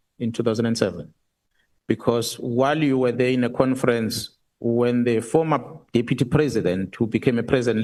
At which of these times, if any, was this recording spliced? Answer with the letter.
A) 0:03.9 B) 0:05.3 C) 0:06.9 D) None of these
D